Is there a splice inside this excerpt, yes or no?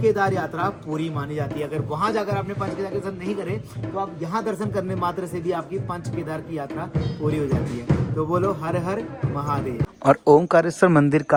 no